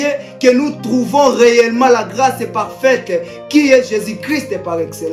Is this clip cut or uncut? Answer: uncut